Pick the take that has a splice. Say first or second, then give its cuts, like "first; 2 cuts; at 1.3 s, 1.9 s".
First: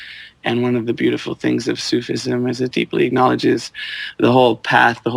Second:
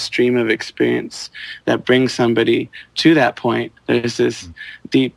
second; 1 cut; at 3.7 s